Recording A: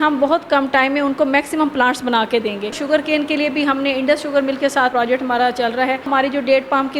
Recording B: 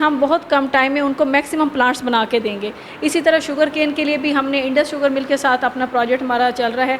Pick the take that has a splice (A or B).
A